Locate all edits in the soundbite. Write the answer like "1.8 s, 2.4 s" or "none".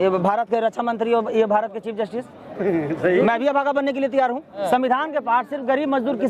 4.5 s